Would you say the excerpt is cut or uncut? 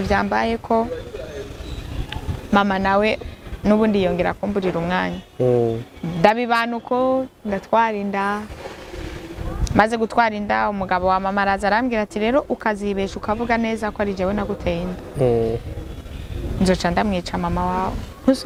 uncut